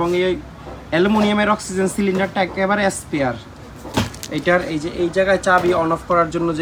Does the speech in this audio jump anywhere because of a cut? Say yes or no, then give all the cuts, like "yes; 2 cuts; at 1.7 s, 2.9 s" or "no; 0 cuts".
no; 0 cuts